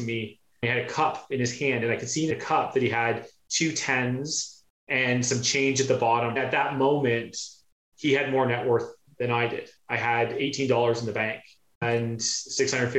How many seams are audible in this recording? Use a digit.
3